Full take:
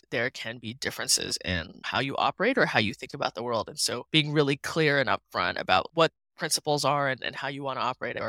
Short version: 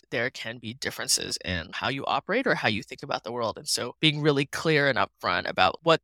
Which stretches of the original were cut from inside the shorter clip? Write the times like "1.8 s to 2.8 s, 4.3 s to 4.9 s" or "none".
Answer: 1.7 s to 1.8 s